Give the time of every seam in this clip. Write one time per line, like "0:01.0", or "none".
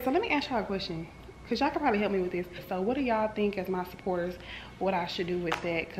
0:02.6